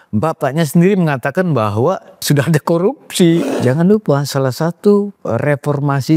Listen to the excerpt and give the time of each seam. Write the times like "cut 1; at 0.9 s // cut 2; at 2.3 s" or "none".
cut 1; at 2.2 s // cut 2; at 3.5 s